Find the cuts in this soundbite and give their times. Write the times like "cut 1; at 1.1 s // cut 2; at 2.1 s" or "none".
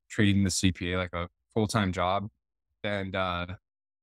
cut 1; at 2.8 s

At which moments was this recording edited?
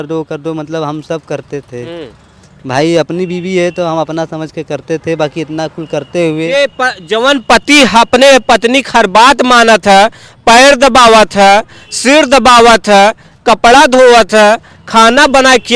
none

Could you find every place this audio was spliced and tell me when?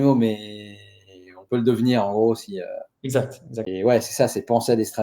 cut 1; at 3.7 s

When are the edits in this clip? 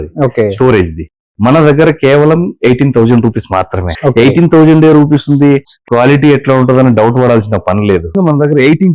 cut 1; at 3.8 s // cut 2; at 8.1 s

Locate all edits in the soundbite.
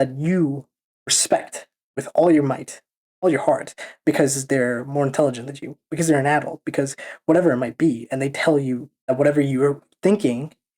cut 1; at 8.9 s

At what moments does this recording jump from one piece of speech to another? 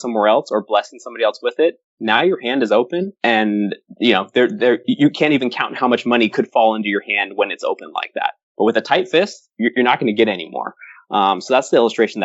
cut 1; at 9.4 s

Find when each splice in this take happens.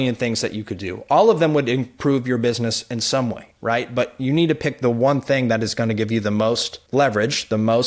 cut 1; at 6.7 s

